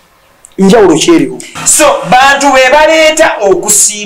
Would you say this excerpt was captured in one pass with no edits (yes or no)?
no